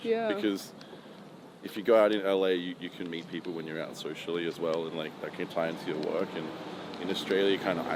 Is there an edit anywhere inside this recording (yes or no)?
no